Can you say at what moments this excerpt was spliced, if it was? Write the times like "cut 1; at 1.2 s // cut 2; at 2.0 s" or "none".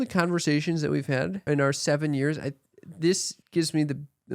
cut 1; at 1.4 s // cut 2; at 3.3 s